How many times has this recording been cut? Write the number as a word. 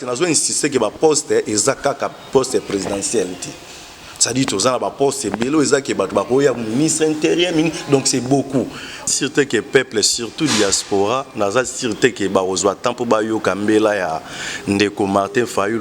one